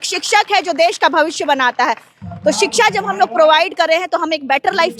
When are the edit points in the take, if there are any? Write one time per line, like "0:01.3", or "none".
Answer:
none